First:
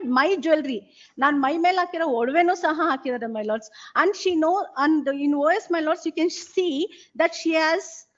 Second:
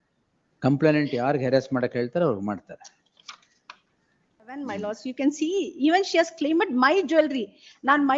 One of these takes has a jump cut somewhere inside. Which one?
second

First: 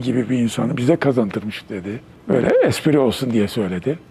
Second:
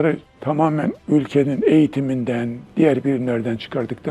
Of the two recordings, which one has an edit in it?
second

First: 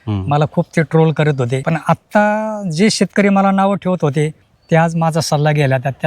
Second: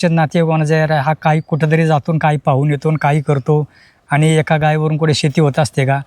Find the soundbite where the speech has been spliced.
first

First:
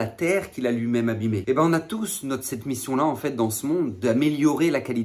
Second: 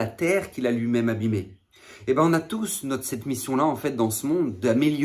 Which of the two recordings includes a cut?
first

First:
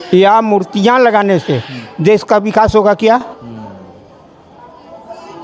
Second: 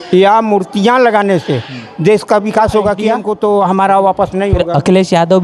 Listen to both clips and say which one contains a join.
second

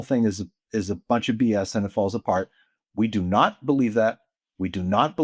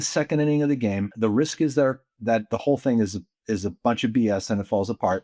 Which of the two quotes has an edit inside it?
second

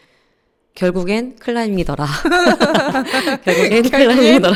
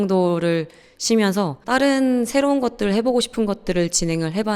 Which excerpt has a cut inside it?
second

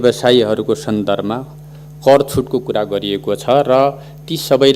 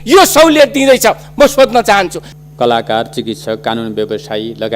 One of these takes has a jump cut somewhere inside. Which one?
second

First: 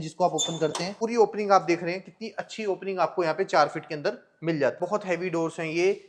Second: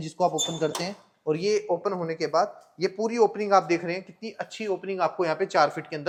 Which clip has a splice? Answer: first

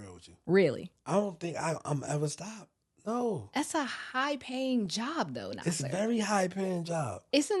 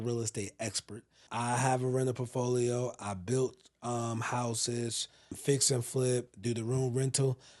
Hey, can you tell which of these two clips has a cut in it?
second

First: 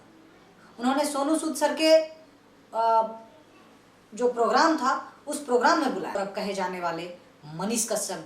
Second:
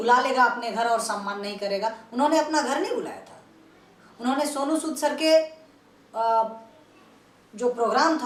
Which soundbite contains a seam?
first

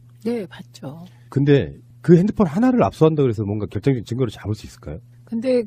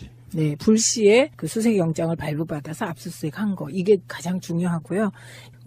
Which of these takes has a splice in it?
second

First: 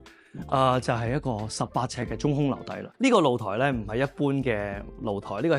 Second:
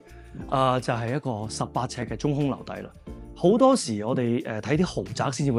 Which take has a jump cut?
first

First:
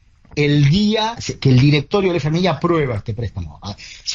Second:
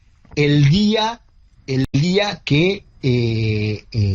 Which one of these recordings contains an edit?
first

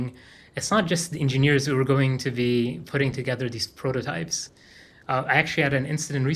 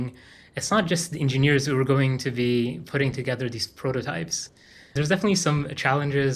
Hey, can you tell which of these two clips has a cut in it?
second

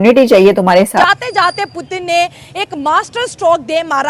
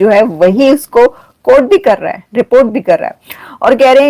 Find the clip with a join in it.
first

